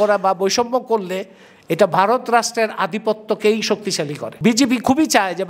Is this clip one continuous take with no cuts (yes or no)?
no